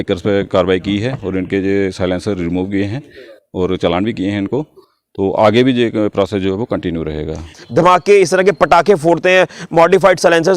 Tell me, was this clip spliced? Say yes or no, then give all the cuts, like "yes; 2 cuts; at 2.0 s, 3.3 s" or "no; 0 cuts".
yes; 1 cut; at 7.6 s